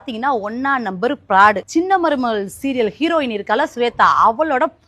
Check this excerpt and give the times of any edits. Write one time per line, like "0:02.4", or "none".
0:01.6